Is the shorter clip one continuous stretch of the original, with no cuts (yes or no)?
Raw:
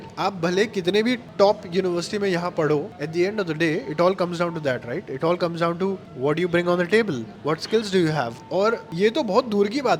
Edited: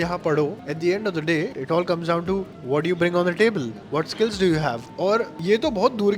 no